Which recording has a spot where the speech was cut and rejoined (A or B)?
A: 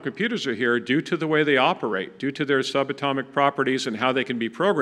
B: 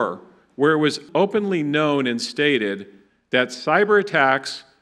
B